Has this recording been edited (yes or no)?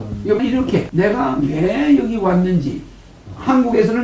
no